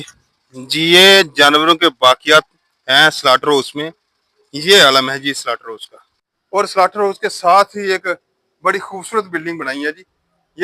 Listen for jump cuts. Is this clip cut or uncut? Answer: cut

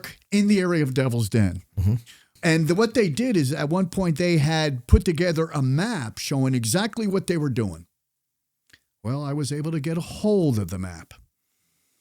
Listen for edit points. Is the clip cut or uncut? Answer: cut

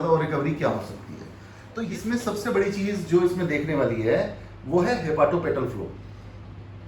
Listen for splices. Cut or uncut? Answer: cut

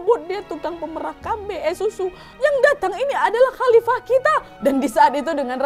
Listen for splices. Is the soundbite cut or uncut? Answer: cut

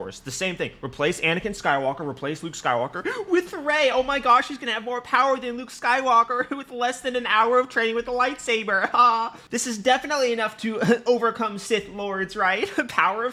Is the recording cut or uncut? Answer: uncut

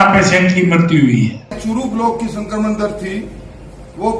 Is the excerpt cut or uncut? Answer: cut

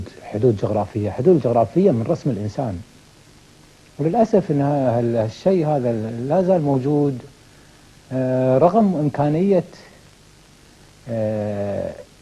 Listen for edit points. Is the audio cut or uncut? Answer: cut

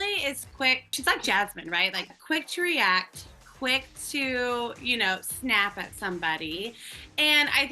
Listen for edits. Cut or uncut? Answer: cut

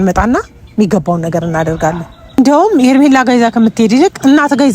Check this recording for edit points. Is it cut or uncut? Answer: cut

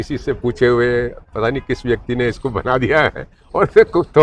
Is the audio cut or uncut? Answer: uncut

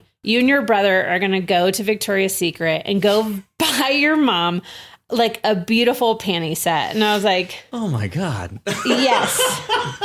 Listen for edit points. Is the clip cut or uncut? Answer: uncut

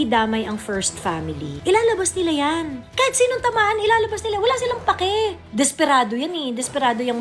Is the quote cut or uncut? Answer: cut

